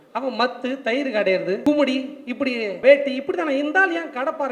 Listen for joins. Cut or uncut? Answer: cut